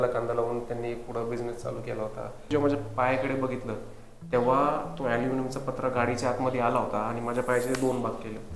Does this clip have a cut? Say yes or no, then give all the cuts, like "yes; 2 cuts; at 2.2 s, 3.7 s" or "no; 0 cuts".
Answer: yes; 1 cut; at 2.5 s